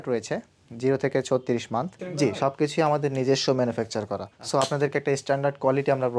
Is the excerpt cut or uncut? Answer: cut